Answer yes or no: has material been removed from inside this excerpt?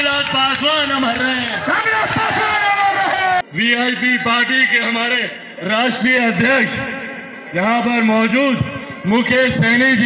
yes